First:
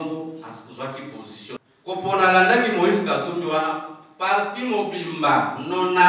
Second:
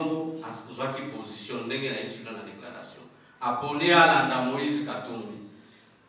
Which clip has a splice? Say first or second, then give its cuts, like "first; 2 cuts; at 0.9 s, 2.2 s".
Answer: first; 1 cut; at 1.6 s